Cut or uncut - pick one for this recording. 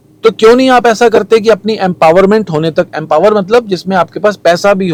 uncut